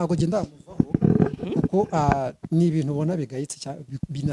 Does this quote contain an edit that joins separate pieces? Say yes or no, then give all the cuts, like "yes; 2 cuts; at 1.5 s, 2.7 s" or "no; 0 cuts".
no; 0 cuts